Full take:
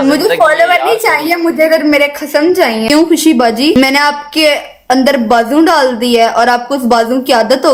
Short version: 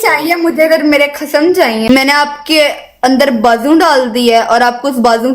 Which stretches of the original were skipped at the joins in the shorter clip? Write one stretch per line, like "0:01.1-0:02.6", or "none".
0:02.9-0:03.7